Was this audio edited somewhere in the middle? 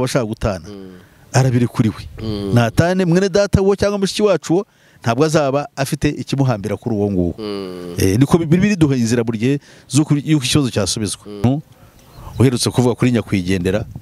yes; 1 cut; at 11.4 s

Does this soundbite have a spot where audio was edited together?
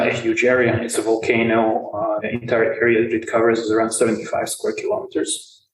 yes; 1 cut; at 2.2 s

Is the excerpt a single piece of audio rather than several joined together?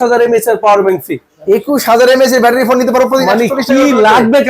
yes; 0 cuts

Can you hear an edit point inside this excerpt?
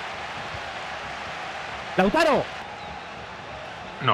yes; 1 cut; at 2.6 s

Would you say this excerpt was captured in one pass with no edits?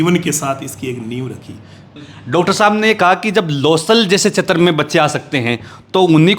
no; 1 cut; at 2.0 s

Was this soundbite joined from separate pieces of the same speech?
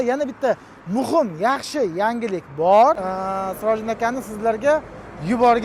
yes; 1 cut; at 3.1 s

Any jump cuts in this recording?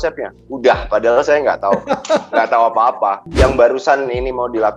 yes; 1 cut; at 3.2 s

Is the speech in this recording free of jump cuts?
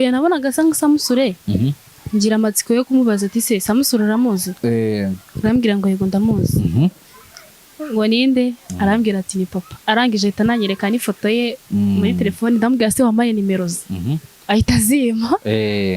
no; 2 cuts; at 8.6 s, 9.7 s

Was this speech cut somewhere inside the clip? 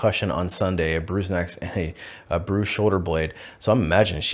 no; 0 cuts

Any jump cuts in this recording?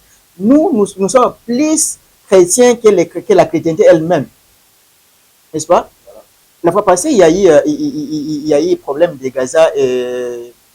no; 0 cuts

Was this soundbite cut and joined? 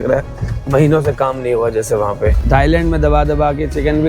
yes; 1 cut; at 2.4 s

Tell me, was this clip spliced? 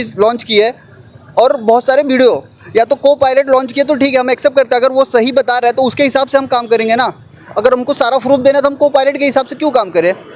no; 0 cuts

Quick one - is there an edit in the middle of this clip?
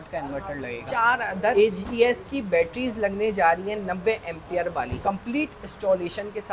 yes; 2 cuts; at 1.2 s, 4.9 s

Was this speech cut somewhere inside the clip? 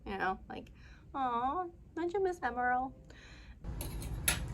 yes; 1 cut; at 3.6 s

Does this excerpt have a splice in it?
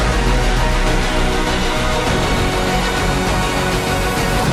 no; 0 cuts

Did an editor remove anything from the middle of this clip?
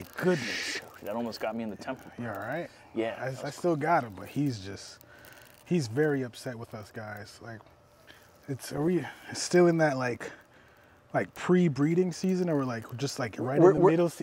no; 0 cuts

